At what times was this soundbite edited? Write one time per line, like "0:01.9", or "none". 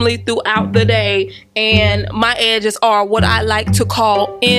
none